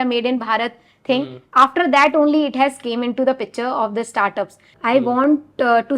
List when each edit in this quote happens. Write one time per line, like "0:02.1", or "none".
0:04.7